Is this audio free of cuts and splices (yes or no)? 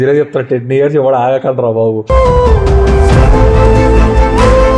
yes